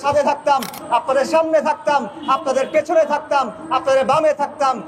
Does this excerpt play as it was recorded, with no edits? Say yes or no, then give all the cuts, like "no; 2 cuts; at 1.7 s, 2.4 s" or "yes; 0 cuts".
yes; 0 cuts